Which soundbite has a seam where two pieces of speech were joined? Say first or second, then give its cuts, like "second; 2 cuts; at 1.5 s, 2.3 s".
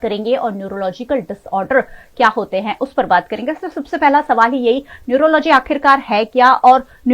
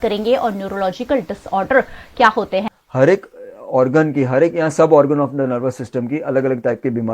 second; 1 cut; at 2.7 s